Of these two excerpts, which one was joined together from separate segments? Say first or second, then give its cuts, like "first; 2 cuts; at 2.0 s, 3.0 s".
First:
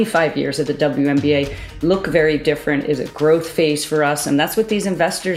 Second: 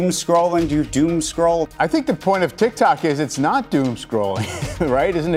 second; 1 cut; at 1.6 s